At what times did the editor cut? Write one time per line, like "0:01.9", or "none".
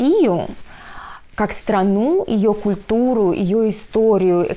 none